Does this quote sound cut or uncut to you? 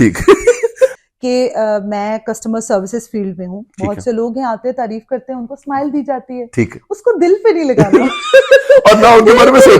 cut